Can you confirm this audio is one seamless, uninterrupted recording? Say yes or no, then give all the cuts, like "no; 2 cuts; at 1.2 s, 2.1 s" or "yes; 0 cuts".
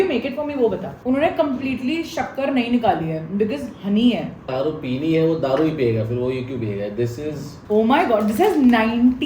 no; 3 cuts; at 0.9 s, 4.4 s, 7.5 s